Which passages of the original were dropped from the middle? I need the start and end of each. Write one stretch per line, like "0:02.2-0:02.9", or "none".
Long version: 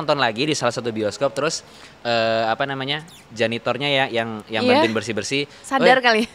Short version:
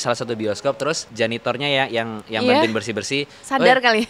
0:01.6-0:03.3